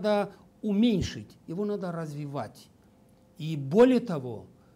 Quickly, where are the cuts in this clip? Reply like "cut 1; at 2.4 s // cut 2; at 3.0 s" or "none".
none